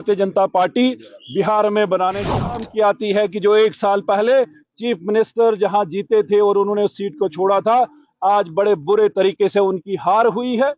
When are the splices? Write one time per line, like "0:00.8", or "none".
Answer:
0:02.5